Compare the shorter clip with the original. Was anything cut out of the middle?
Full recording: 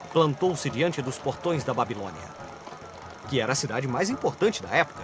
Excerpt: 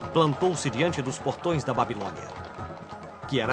no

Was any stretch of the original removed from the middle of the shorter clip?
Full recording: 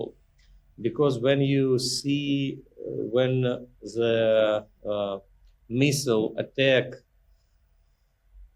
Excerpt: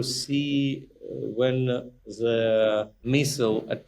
yes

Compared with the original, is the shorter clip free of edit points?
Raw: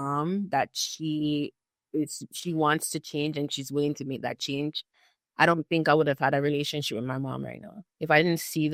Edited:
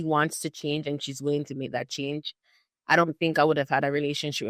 yes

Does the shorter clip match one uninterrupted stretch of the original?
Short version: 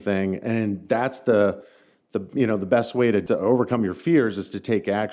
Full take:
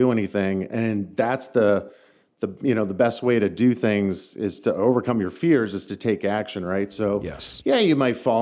no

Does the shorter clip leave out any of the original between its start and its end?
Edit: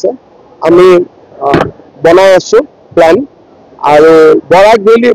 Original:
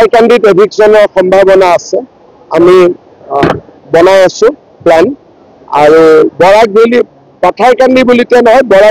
no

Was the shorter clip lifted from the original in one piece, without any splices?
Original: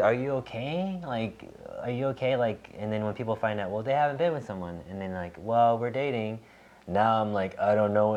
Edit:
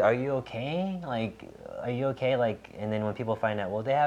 yes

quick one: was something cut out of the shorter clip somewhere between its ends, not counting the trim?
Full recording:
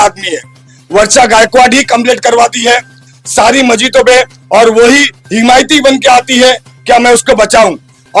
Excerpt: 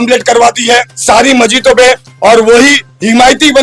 yes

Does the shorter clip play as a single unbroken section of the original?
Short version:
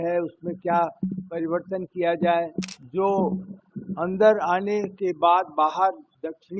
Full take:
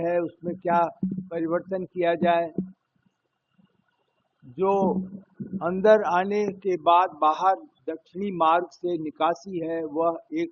no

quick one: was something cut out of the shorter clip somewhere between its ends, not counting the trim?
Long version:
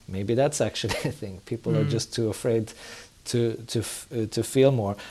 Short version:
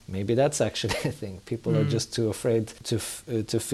yes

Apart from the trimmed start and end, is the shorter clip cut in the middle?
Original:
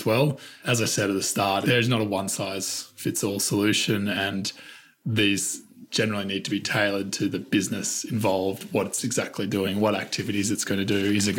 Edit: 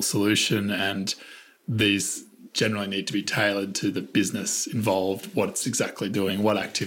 no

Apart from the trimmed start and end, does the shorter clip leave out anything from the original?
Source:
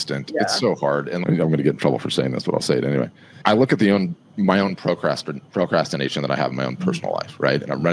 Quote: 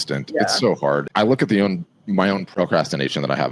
yes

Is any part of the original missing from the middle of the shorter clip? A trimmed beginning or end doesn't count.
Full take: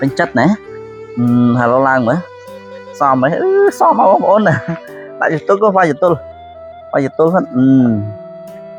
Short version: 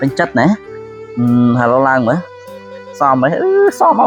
no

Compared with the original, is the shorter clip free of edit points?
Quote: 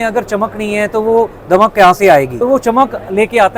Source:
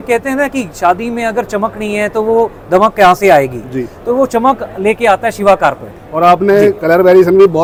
no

